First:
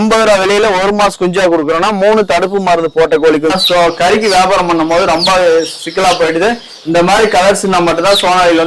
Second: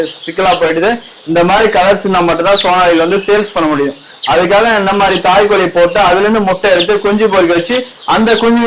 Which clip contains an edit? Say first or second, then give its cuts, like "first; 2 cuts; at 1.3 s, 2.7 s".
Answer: first; 1 cut; at 3.5 s